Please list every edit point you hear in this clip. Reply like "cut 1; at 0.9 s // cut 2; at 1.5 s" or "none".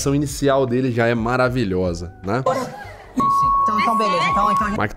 none